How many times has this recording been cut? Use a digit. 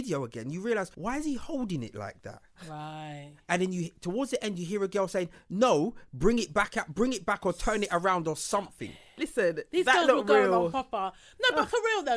1